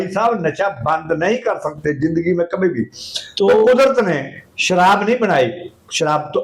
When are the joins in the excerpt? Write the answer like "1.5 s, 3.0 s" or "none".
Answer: none